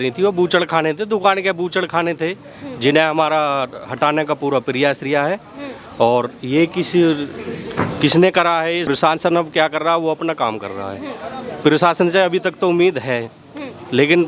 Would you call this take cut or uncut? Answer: uncut